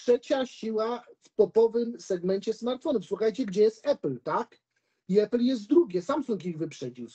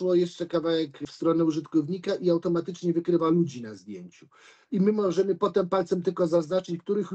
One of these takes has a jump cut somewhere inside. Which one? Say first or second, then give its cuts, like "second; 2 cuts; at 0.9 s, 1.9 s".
second; 1 cut; at 1.0 s